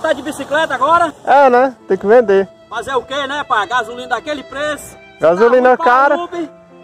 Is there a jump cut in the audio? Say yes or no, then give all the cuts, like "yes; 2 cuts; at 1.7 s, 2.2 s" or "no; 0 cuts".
yes; 1 cut; at 1.2 s